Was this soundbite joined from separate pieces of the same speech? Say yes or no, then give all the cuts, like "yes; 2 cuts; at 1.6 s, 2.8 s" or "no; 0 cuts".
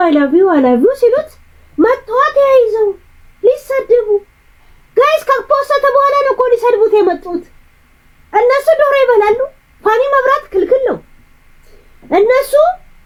no; 0 cuts